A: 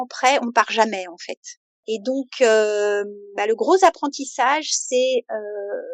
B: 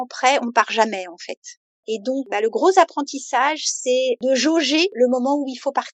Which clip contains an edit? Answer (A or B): B